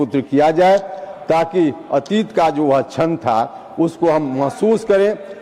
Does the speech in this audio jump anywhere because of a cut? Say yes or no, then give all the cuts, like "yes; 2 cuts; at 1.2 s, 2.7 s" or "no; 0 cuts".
no; 0 cuts